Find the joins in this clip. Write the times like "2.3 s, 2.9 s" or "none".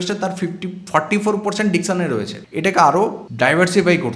2.4 s, 3.2 s